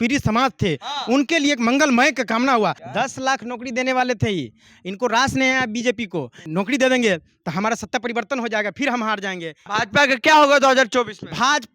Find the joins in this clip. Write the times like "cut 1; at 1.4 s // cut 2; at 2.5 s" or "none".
cut 1; at 2.8 s // cut 2; at 6.5 s // cut 3; at 9.7 s